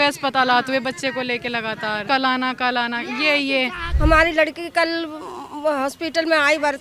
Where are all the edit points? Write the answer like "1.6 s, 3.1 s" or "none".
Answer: 2.0 s, 3.8 s